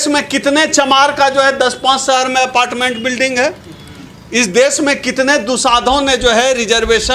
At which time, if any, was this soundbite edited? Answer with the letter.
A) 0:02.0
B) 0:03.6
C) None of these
C